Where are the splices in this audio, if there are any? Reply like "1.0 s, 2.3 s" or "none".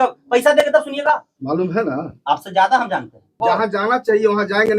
1.3 s, 3.4 s

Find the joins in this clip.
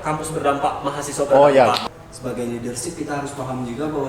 1.8 s

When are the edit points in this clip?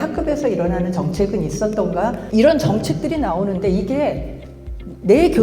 2.2 s

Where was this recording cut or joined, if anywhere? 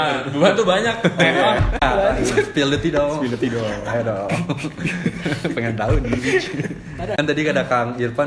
1.8 s, 7.1 s

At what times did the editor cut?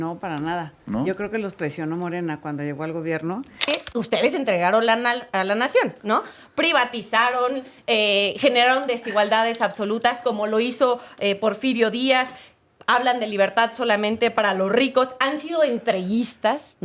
3.6 s

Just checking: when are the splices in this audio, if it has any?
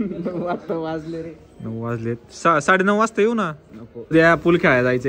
4.1 s

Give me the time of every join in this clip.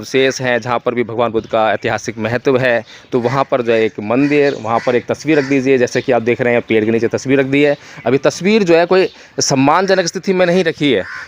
none

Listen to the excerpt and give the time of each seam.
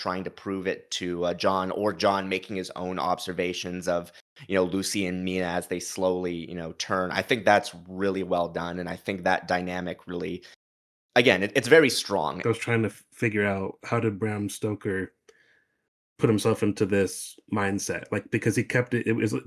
12.4 s

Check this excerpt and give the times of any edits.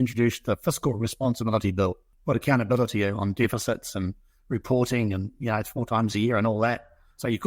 2.1 s

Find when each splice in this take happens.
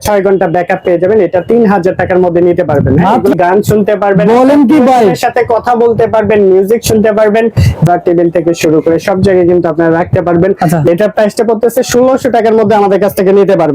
3.3 s, 7.9 s, 10.9 s

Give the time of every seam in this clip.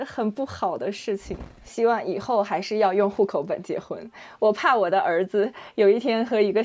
1.6 s

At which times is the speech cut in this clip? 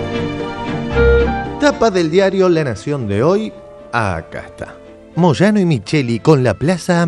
1.5 s

